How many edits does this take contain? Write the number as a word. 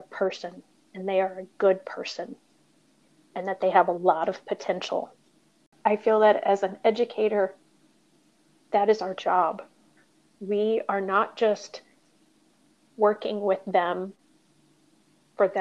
one